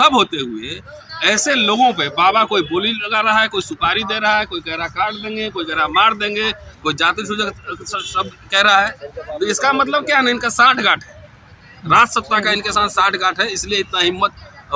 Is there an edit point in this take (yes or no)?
no